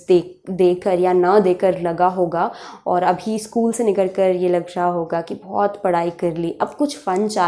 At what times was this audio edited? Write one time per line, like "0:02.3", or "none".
none

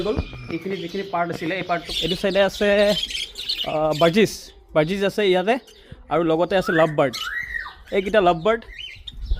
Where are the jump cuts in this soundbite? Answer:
0:01.9

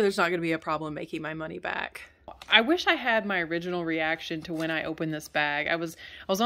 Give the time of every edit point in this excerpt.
0:02.4

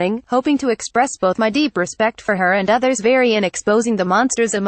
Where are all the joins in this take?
none

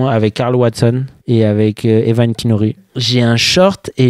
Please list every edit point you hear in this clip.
0:01.1
0:03.0

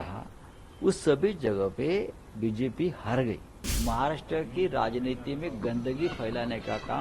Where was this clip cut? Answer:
0:03.7

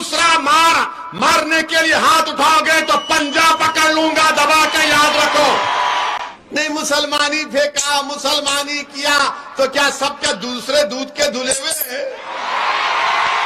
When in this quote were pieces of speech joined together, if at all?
0:06.2

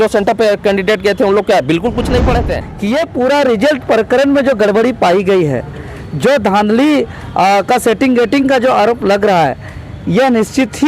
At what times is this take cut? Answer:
0:02.6

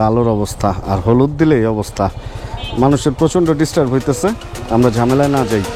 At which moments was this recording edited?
none

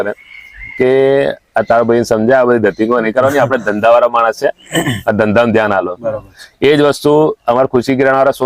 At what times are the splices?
none

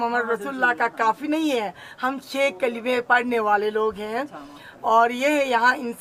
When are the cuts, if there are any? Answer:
none

